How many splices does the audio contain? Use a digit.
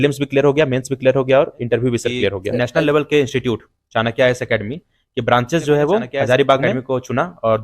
2